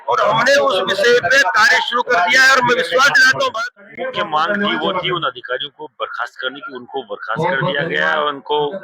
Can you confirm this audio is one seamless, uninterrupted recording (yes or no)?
no